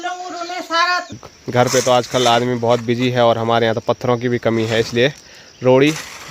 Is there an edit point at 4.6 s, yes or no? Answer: no